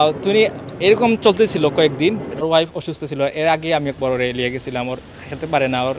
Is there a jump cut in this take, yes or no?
yes